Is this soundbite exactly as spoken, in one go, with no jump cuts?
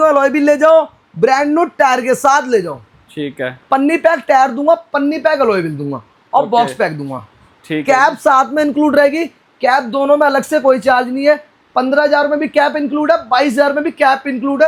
yes; 0 cuts

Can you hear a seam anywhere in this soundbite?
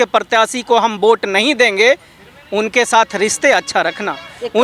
no; 0 cuts

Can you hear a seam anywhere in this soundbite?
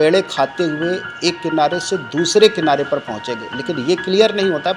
no; 0 cuts

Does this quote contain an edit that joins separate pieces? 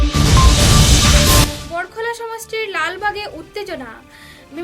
yes; 1 cut; at 1.6 s

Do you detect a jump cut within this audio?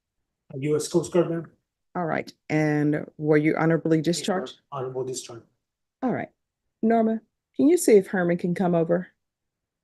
no; 0 cuts

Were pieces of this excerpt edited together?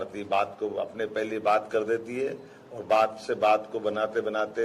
no; 0 cuts

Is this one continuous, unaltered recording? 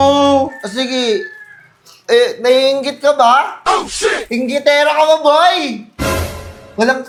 yes; 0 cuts

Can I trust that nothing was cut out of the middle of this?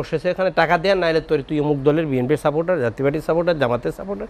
yes; 0 cuts

